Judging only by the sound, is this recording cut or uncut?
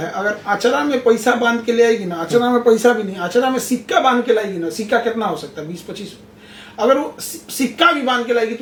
uncut